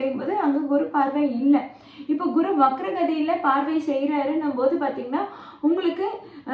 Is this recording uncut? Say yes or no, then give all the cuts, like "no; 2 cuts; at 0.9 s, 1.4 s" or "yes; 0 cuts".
yes; 0 cuts